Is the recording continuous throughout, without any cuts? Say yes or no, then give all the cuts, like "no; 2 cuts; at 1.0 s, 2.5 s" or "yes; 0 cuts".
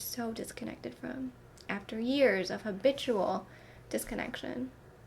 yes; 0 cuts